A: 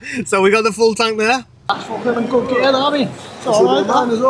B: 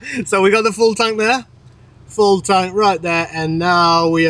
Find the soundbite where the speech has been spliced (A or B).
A